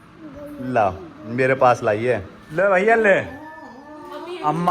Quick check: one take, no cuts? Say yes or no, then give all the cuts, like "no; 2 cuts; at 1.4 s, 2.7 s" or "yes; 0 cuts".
no; 1 cut; at 2.5 s